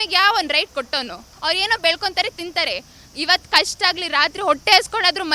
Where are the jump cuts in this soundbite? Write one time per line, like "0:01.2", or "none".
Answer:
0:01.2